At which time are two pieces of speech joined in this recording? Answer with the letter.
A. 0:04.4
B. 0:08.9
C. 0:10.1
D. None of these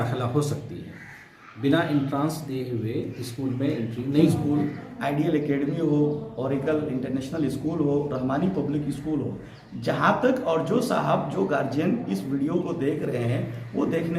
A